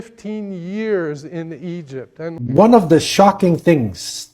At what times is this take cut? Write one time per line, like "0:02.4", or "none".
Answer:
0:02.3

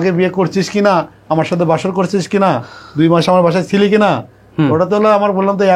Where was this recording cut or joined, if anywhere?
none

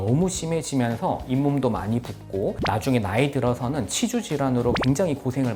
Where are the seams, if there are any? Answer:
none

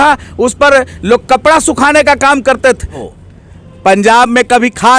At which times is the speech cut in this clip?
0:03.1

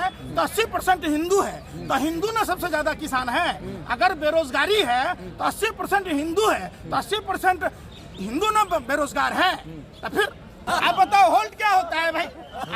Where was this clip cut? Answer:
0:10.6

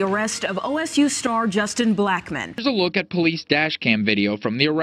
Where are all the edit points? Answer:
0:02.5

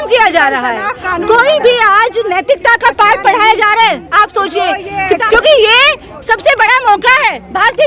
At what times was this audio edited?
0:05.2

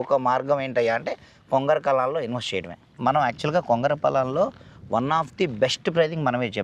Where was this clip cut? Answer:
0:02.9

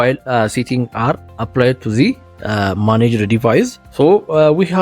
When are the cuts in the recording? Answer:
0:01.3
0:03.8

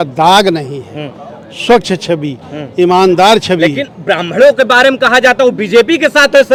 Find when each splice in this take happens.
none

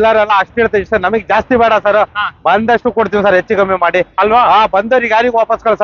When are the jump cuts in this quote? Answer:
none

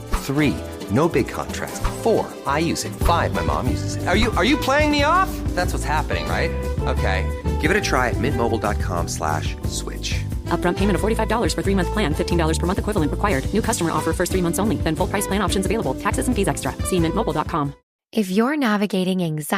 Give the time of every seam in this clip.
0:17.9

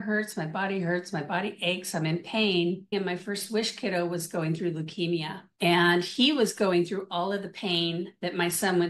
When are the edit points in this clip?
0:02.9

